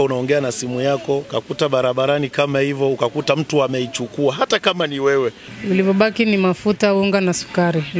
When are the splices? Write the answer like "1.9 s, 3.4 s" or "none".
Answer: 1.3 s, 5.5 s